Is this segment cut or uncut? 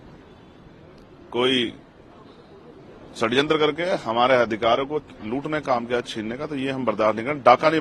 uncut